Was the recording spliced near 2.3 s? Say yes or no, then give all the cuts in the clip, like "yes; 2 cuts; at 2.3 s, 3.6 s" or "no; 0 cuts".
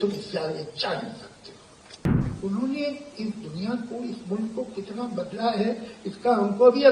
yes; 1 cut; at 2.3 s